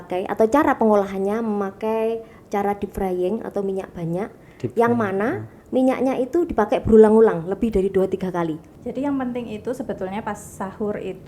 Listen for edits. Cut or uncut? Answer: cut